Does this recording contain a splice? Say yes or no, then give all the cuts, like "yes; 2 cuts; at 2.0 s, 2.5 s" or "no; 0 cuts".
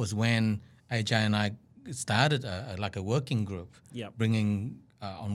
no; 0 cuts